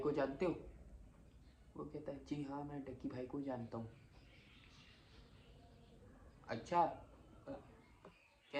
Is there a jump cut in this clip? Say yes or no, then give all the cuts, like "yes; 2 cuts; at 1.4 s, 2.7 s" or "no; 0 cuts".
no; 0 cuts